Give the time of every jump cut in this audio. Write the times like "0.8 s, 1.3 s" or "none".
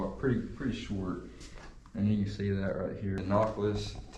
3.2 s